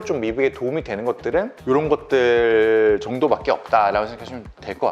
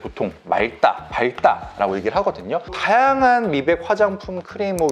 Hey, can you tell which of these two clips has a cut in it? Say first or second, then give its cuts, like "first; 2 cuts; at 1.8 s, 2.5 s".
second; 1 cut; at 2.6 s